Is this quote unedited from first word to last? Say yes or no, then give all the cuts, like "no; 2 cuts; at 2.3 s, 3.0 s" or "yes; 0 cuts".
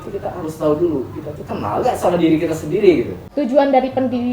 no; 1 cut; at 3.2 s